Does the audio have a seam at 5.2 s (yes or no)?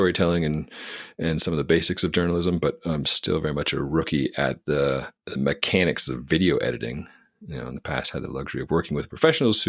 yes